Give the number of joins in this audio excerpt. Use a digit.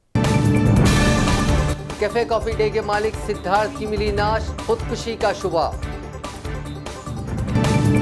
1